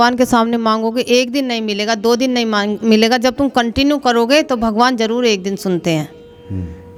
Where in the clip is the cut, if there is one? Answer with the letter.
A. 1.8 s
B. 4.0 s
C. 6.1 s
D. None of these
D